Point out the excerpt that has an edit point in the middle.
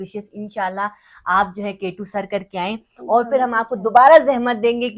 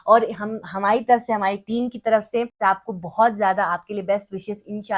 second; 1 cut; at 2.6 s

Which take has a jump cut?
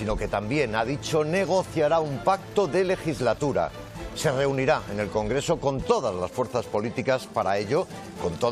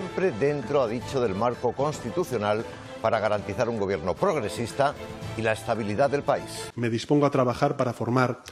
second; 1 cut; at 6.6 s

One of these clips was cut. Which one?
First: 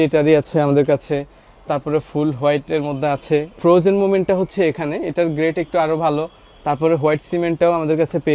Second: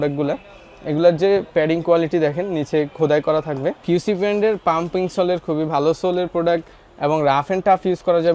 second; 1 cut; at 3.8 s

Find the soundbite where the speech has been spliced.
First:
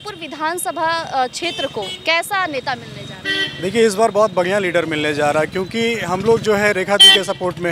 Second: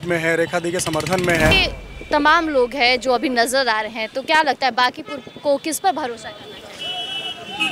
second; 1 cut; at 1.6 s

